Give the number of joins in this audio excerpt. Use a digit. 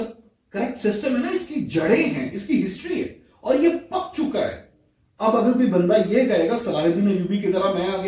0